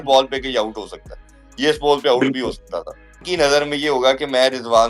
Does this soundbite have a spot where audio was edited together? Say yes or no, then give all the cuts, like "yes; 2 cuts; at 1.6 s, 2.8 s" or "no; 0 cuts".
yes; 1 cut; at 3.2 s